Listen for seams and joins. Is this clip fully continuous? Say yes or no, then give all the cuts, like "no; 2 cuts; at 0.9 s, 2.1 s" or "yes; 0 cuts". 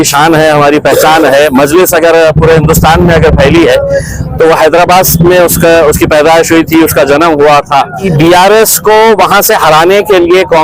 no; 1 cut; at 8.0 s